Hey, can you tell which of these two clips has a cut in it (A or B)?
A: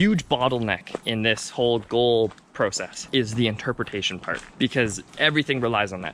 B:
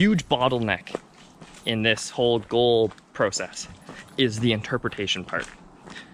A